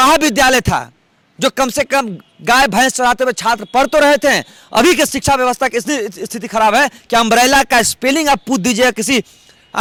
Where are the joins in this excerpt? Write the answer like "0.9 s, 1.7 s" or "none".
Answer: none